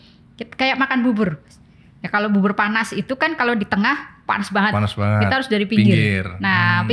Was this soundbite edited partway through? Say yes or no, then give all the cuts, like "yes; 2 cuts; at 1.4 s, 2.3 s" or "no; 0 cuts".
no; 0 cuts